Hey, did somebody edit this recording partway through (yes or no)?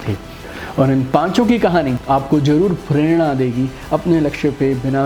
yes